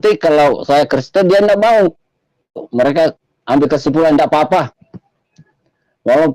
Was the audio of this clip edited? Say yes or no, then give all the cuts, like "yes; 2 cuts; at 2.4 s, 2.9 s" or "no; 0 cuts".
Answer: yes; 1 cut; at 2.6 s